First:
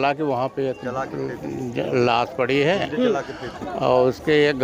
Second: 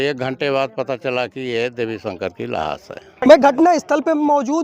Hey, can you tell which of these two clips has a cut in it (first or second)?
second